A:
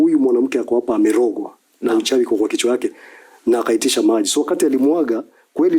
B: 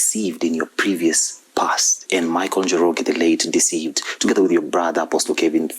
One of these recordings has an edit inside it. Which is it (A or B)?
B